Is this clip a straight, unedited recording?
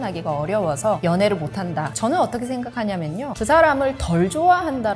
no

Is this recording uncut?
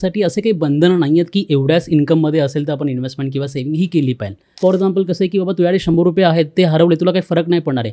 no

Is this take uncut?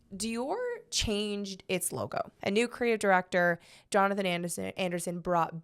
no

